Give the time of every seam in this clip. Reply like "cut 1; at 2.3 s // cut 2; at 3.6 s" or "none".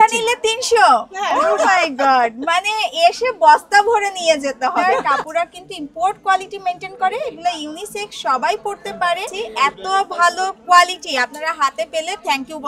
cut 1; at 1.3 s // cut 2; at 4.8 s // cut 3; at 9.3 s